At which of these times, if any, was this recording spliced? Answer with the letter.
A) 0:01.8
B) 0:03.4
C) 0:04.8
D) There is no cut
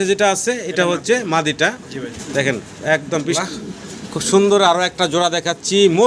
B